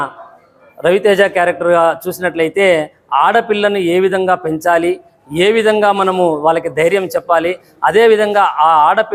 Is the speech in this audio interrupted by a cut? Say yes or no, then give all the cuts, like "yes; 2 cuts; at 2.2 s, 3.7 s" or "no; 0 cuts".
no; 0 cuts